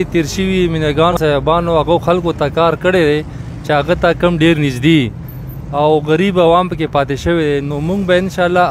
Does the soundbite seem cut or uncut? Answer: cut